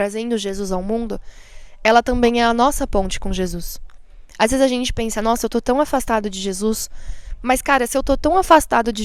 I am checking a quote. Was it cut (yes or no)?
no